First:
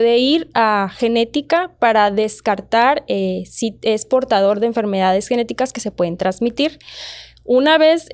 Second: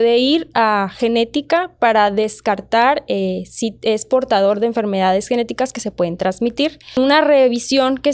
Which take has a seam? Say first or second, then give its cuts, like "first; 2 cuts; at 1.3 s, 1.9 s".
second; 1 cut; at 7.0 s